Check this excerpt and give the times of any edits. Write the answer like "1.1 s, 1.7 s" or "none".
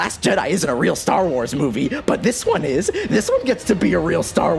2.0 s